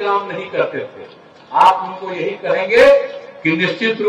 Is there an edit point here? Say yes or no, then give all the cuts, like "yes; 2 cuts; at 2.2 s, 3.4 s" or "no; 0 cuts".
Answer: no; 0 cuts